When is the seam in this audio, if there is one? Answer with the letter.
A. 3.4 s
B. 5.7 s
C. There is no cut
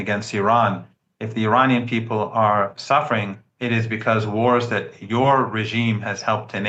C